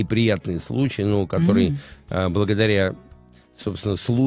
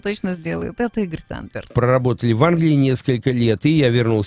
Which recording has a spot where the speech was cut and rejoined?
second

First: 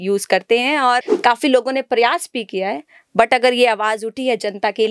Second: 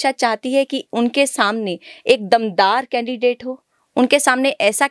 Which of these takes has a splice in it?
first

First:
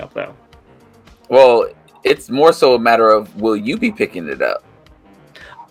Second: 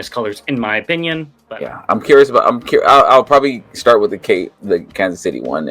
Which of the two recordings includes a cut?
second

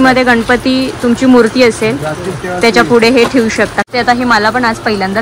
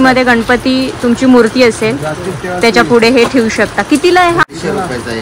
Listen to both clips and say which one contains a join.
first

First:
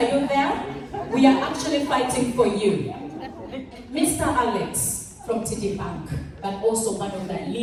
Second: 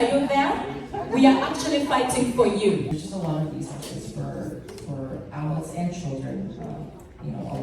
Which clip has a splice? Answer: second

